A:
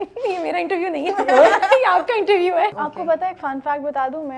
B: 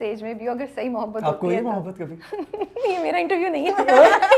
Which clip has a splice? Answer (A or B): A